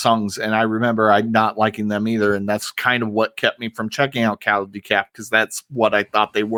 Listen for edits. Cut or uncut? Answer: uncut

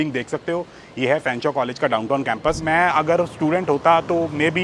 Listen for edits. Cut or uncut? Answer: cut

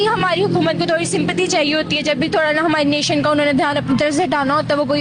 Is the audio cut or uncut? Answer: uncut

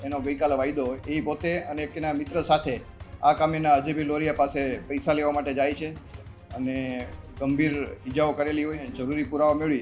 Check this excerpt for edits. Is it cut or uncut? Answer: cut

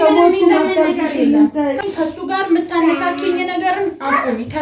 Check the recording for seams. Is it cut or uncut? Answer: cut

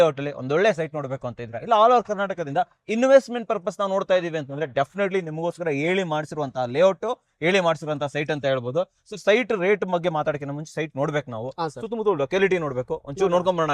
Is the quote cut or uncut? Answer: uncut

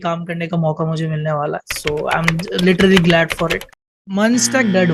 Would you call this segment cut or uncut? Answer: cut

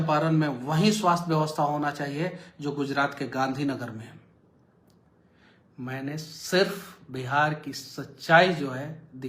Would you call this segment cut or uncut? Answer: cut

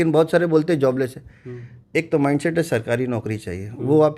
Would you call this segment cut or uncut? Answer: uncut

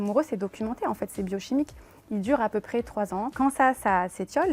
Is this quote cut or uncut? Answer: cut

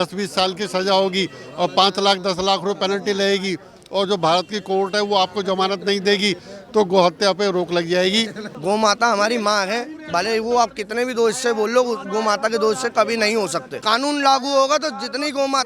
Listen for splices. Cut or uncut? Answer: cut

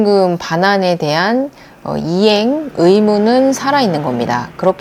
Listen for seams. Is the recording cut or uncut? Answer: uncut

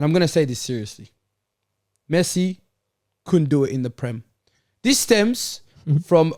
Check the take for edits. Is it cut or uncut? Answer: uncut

